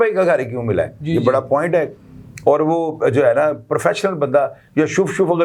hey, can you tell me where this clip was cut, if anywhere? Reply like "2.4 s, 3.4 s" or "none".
none